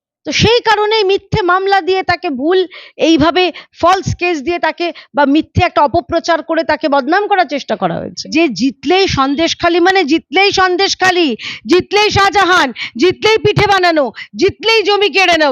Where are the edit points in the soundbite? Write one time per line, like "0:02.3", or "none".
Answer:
0:08.2